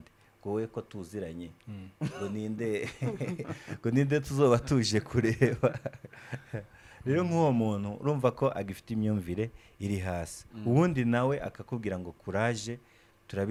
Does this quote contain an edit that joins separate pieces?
no; 0 cuts

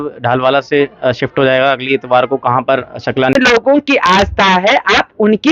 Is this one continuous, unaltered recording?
no; 1 cut; at 3.4 s

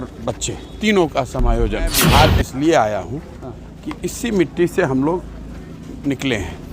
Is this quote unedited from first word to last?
no; 1 cut; at 2.0 s

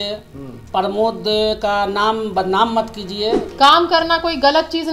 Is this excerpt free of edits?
no; 1 cut; at 3.5 s

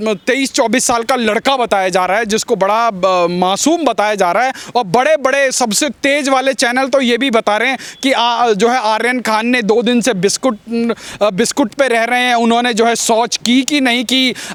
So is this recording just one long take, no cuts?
yes; 0 cuts

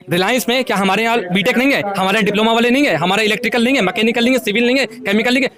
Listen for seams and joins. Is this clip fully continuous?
yes; 0 cuts

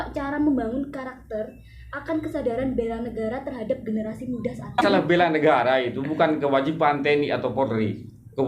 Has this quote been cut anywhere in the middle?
yes; 1 cut; at 4.8 s

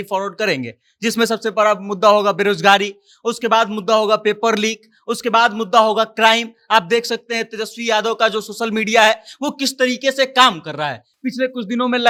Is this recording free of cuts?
yes; 0 cuts

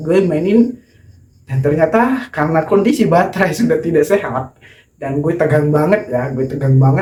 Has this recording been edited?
no; 0 cuts

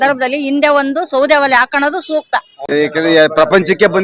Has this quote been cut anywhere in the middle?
yes; 1 cut; at 2.7 s

